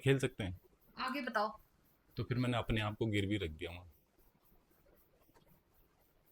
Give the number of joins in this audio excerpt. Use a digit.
0